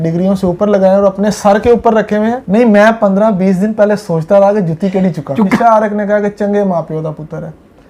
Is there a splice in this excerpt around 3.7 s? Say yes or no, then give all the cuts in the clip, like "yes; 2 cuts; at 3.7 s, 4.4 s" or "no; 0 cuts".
no; 2 cuts; at 2.4 s, 5.6 s